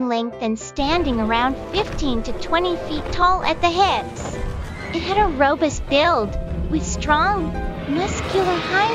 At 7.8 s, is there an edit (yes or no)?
no